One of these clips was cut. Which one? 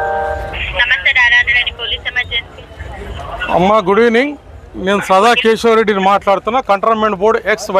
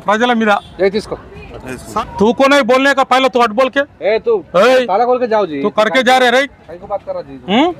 second; 1 cut; at 1.9 s

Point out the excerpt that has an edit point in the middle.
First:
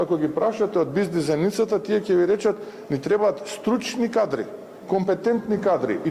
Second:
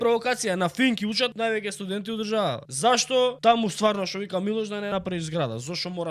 second; 4 cuts; at 1.3 s, 2.7 s, 3.4 s, 4.9 s

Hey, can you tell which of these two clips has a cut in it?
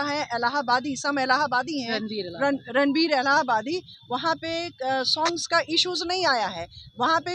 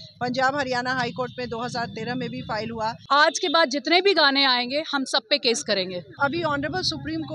second; 2 cuts; at 3.0 s, 6.2 s

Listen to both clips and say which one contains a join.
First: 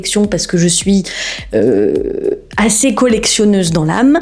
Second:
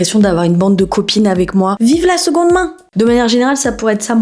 second; 2 cuts; at 1.7 s, 2.8 s

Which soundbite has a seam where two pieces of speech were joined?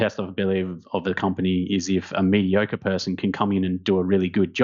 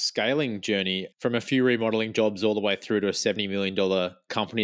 second; 2 cuts; at 1.1 s, 3.4 s

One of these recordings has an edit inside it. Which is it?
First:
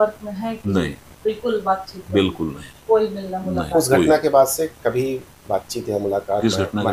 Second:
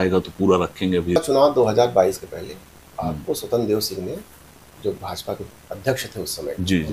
second; 1 cut; at 1.2 s

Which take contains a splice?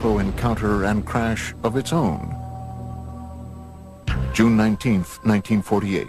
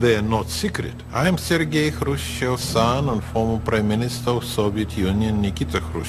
second; 1 cut; at 5.2 s

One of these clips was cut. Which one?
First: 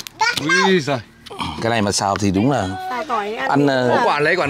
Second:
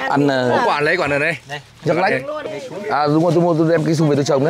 second; 1 cut; at 2.4 s

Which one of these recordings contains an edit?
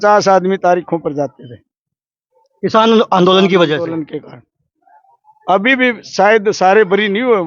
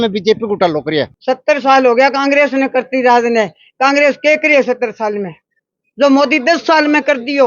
second; 1 cut; at 1.1 s

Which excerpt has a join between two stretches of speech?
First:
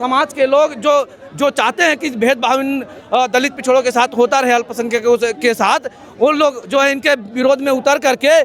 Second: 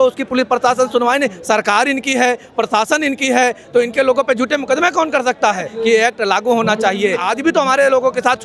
second; 2 cuts; at 5.7 s, 7.3 s

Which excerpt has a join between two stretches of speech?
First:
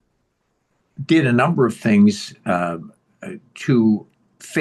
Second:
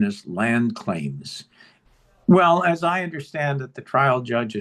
second; 1 cut; at 1.5 s

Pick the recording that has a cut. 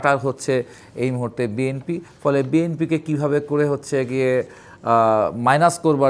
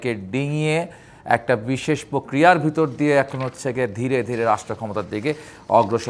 first; 1 cut; at 2.1 s

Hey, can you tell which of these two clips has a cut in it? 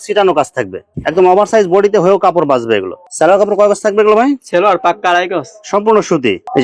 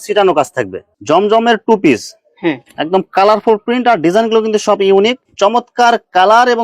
second; 2 cuts; at 0.9 s, 5.2 s

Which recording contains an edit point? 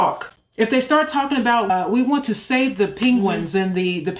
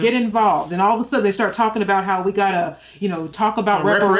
first; 1 cut; at 1.7 s

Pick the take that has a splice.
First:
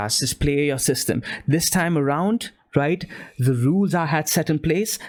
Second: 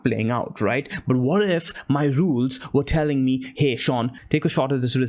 second; 1 cut; at 4.2 s

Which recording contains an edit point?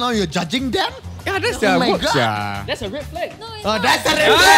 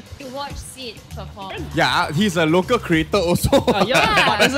second; 1 cut; at 1.6 s

